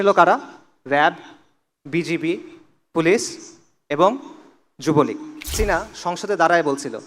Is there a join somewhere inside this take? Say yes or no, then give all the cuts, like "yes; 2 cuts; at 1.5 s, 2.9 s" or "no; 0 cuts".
yes; 1 cut; at 5.5 s